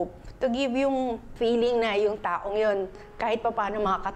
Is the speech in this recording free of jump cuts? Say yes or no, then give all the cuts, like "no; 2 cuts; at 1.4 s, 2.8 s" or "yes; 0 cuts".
no; 1 cut; at 1.2 s